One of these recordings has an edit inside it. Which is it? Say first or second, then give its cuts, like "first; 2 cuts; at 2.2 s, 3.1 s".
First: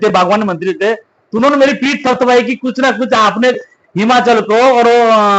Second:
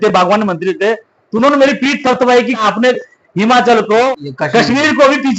second; 2 cuts; at 2.6 s, 4.1 s